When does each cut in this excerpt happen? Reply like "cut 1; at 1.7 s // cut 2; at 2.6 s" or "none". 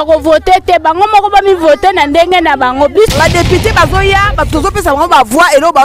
cut 1; at 3.1 s